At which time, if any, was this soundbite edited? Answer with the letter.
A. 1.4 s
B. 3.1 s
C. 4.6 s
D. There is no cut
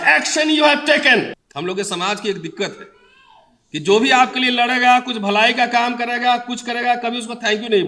A